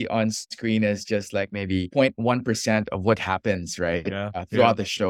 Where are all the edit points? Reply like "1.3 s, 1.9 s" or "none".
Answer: none